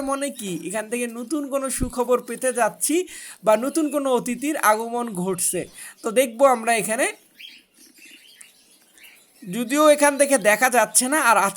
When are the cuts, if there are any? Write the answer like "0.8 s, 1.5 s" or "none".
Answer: none